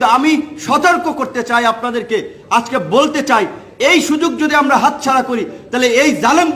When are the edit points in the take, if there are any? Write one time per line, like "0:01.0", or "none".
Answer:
none